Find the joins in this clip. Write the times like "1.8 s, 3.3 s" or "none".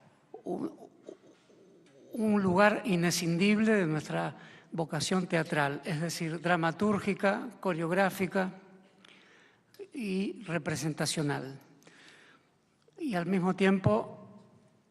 2.6 s